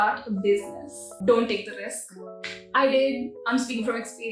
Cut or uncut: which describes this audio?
cut